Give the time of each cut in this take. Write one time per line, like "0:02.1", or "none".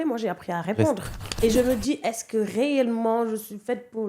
0:01.3